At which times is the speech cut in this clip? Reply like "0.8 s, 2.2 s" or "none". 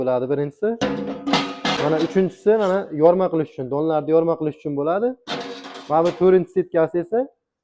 1.8 s